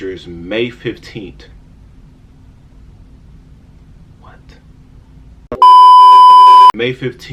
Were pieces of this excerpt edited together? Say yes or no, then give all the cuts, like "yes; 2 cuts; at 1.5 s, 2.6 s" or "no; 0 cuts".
no; 0 cuts